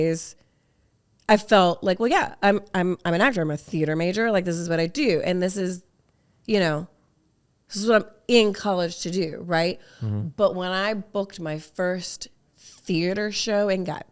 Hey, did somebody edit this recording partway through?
no; 0 cuts

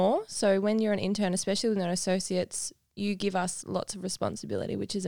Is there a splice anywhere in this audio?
no; 0 cuts

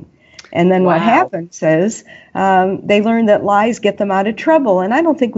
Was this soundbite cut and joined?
no; 0 cuts

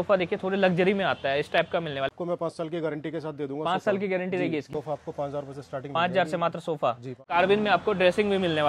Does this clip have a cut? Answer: yes; 3 cuts; at 2.1 s, 4.7 s, 7.3 s

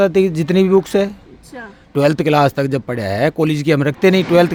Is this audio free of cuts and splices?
yes; 0 cuts

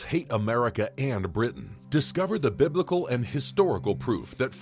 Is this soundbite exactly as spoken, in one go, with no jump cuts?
no; 1 cut; at 1.7 s

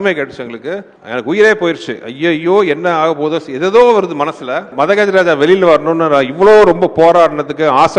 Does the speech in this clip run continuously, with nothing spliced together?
no; 2 cuts; at 1.0 s, 4.7 s

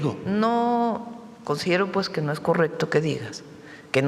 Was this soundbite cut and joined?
no; 0 cuts

